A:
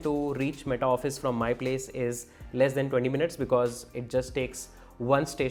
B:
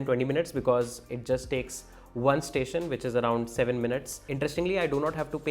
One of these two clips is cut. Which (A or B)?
B